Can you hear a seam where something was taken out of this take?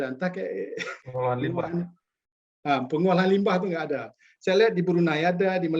yes; 1 cut; at 1.0 s

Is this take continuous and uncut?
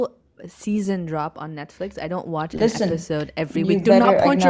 yes; 0 cuts

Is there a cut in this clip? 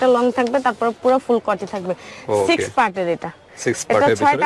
no; 0 cuts

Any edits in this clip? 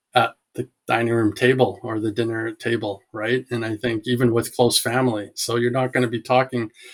no; 0 cuts

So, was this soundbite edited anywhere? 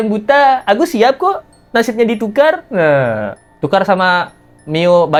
no; 0 cuts

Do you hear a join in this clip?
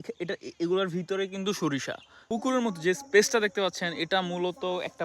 yes; 1 cut; at 2.2 s

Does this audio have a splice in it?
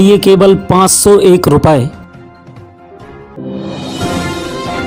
yes; 1 cut; at 3.3 s

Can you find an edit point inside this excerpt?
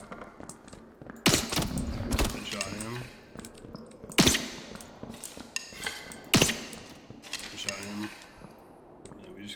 no; 0 cuts

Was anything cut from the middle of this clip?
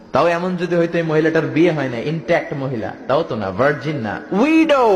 no; 0 cuts

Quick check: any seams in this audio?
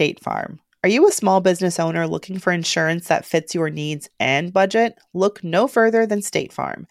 no; 0 cuts

